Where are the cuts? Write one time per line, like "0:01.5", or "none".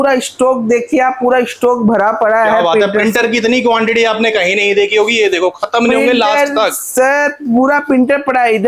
none